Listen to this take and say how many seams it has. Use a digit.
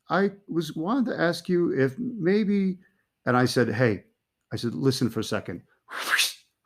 0